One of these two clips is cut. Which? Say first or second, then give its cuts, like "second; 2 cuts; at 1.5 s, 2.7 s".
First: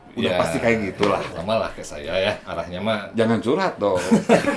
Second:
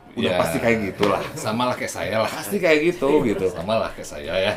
first; 1 cut; at 1.4 s